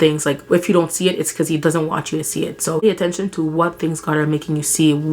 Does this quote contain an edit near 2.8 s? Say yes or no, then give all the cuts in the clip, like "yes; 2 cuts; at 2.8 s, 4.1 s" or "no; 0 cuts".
yes; 1 cut; at 2.8 s